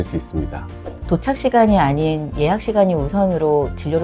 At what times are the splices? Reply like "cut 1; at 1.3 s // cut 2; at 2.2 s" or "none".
cut 1; at 1.0 s